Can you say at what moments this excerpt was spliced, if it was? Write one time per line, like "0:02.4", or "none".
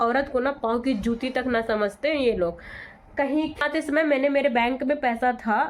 0:03.6